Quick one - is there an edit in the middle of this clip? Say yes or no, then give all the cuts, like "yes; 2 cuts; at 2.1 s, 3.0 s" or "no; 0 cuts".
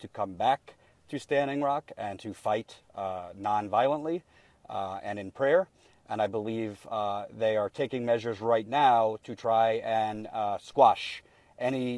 yes; 1 cut; at 8.2 s